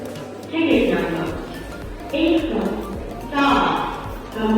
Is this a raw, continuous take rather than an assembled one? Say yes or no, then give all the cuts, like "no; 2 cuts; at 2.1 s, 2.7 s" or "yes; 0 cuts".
yes; 0 cuts